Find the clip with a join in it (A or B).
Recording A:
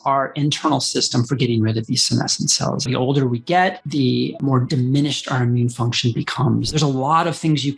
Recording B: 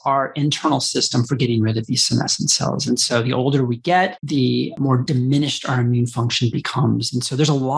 A